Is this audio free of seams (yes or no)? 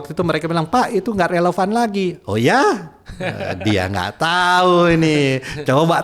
yes